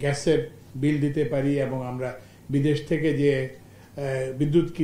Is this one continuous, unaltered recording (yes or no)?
yes